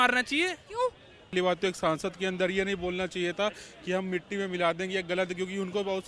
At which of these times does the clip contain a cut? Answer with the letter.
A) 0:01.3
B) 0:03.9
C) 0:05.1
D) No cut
A